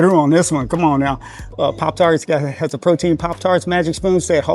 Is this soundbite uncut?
no; 1 cut; at 1.5 s

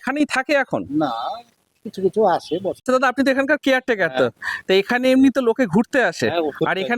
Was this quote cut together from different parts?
yes; 1 cut; at 2.7 s

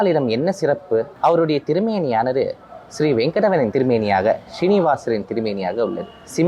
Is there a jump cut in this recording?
yes; 2 cuts; at 1.1 s, 3.7 s

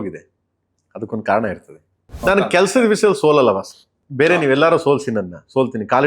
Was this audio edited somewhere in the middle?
yes; 1 cut; at 2.2 s

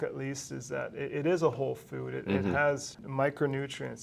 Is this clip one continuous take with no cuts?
no; 1 cut; at 3.0 s

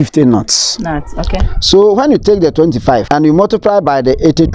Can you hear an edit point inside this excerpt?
no; 0 cuts

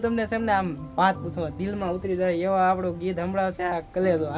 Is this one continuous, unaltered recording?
yes; 0 cuts

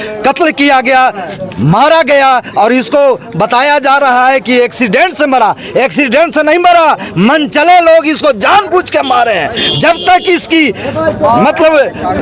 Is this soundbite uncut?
yes; 0 cuts

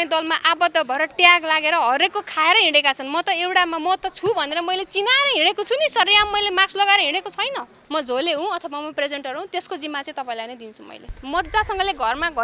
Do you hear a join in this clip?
yes; 2 cuts; at 7.8 s, 11.1 s

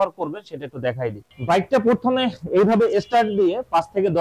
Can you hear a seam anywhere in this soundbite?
no; 0 cuts

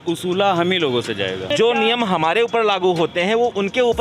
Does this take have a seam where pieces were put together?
yes; 1 cut; at 1.5 s

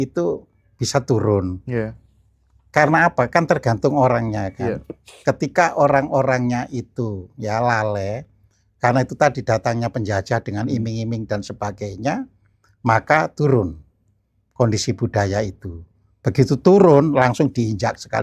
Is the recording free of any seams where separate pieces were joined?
yes; 0 cuts

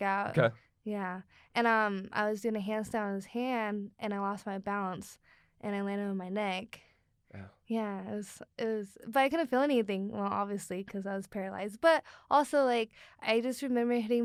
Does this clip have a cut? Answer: no; 0 cuts

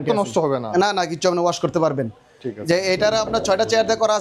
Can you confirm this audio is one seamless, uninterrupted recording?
yes; 0 cuts

